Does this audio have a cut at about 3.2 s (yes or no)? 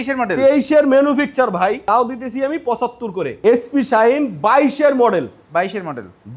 yes